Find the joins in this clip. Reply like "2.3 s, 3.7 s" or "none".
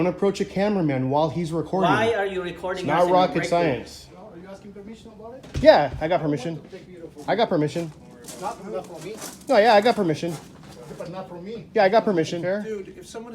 4.0 s, 12.4 s